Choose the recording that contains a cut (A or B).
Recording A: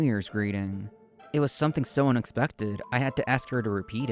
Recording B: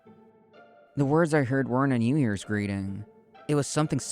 B